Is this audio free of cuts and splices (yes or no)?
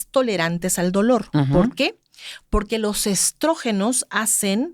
yes